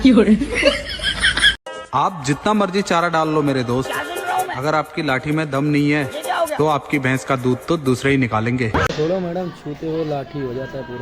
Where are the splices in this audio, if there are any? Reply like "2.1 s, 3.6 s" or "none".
1.7 s